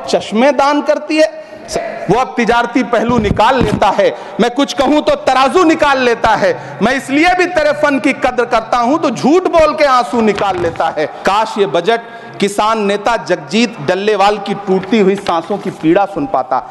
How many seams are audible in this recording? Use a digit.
2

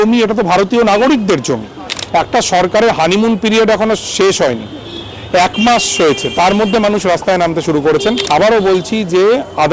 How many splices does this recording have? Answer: 2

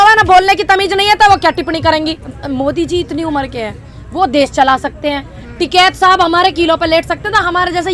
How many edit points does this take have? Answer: 0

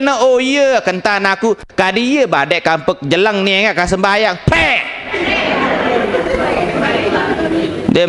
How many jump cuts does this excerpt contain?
0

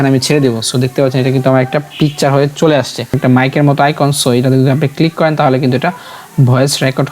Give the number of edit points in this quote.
1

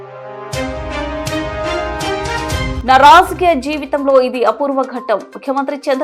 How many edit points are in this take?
1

